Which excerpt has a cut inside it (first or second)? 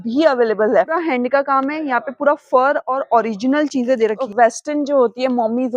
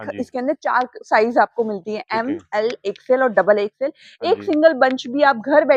first